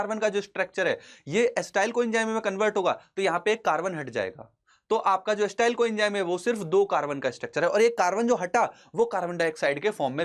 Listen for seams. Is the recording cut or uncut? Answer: uncut